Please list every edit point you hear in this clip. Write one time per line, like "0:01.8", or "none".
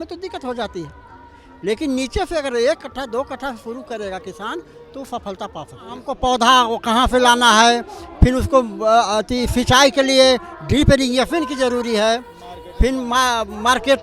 0:06.1